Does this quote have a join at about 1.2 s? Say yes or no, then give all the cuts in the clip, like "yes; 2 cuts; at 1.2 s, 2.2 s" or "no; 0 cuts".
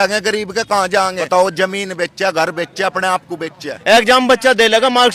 yes; 2 cuts; at 1.2 s, 3.7 s